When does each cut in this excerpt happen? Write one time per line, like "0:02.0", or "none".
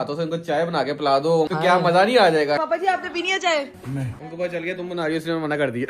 0:01.5
0:02.6
0:04.1